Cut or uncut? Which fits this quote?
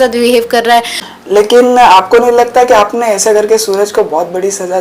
cut